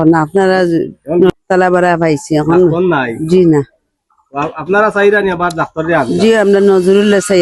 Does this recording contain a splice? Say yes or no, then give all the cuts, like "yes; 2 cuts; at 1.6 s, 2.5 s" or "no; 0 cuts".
yes; 1 cut; at 1.3 s